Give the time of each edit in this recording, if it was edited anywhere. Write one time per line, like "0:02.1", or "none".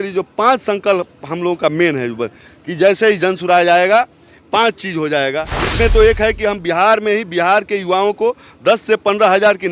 0:05.6